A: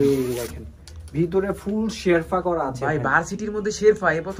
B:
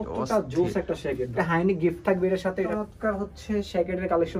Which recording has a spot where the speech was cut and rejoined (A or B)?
B